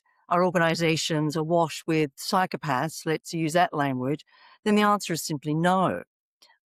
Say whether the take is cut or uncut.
uncut